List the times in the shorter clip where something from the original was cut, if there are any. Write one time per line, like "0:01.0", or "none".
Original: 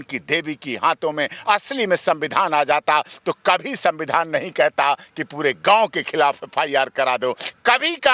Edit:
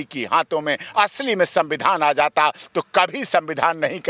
none